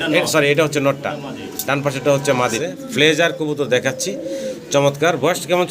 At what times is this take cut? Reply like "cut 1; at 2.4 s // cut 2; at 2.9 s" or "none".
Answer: cut 1; at 2.6 s